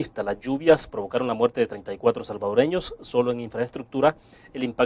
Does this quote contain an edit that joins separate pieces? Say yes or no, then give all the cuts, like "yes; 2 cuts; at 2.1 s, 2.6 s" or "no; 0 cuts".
yes; 1 cut; at 3.3 s